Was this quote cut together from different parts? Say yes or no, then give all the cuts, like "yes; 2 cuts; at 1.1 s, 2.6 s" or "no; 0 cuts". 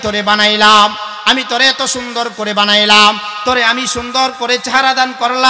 no; 0 cuts